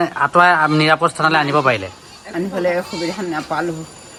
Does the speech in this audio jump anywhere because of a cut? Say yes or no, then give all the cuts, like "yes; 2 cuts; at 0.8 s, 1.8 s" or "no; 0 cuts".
no; 0 cuts